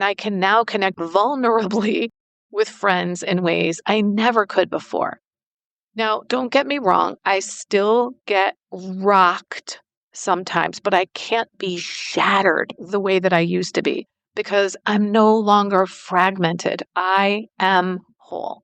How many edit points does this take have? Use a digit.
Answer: 1